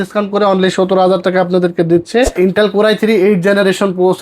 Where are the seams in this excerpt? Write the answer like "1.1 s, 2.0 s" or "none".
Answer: 2.4 s